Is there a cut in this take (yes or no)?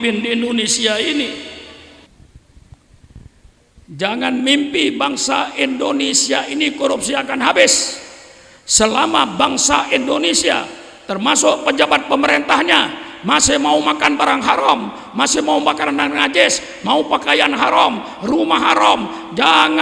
yes